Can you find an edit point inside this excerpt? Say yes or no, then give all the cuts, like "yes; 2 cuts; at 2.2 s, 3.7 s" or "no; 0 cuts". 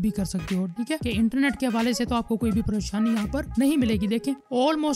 yes; 1 cut; at 1.0 s